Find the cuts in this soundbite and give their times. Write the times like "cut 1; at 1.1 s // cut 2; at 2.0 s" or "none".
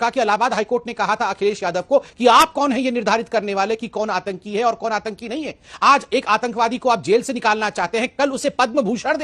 none